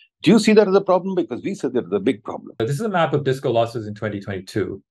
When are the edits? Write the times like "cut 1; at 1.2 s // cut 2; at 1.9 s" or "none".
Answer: cut 1; at 2.6 s